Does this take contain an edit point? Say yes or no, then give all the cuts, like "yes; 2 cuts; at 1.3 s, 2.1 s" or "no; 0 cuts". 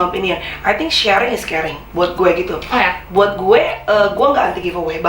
no; 0 cuts